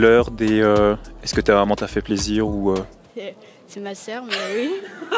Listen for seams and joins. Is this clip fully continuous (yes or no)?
yes